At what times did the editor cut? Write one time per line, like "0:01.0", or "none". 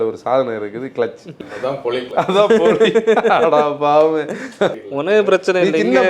0:01.5
0:04.7